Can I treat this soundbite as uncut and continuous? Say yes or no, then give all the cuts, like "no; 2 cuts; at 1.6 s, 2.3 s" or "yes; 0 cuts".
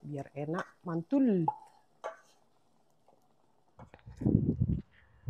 no; 1 cut; at 4.1 s